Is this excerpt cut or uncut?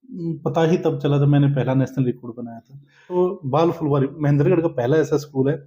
cut